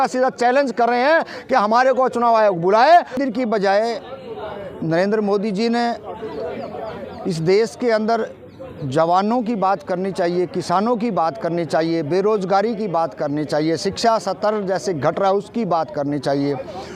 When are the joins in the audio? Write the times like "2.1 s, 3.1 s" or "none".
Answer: 3.2 s